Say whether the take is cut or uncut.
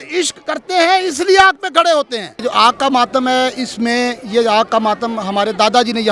cut